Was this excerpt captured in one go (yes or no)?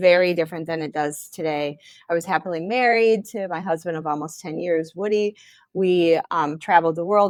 yes